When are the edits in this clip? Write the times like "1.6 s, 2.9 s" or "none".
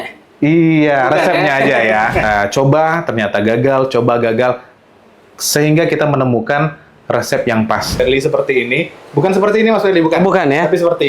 2.2 s, 8.0 s